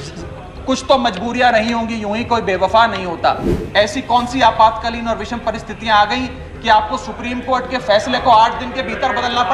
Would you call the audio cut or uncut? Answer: cut